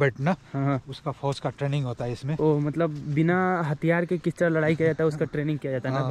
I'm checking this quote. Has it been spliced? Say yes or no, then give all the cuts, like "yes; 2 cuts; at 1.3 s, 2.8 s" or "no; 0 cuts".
no; 0 cuts